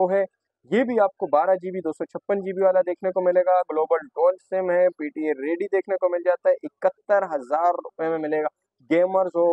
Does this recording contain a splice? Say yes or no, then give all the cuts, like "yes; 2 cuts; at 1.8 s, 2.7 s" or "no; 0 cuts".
no; 0 cuts